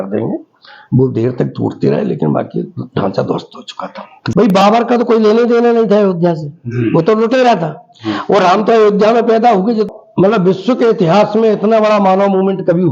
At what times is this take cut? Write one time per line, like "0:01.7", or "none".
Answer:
0:04.2
0:09.9